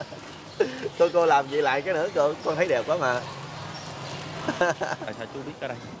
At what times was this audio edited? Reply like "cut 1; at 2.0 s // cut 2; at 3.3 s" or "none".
cut 1; at 5.0 s